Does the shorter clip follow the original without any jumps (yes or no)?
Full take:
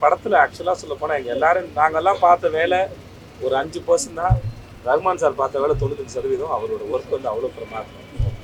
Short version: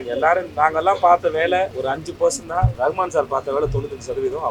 no